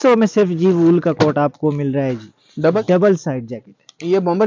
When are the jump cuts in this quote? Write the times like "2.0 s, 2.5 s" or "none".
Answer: 2.8 s